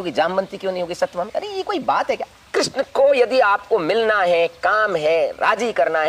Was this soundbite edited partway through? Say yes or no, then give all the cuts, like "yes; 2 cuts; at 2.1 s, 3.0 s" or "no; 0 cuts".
yes; 1 cut; at 2.4 s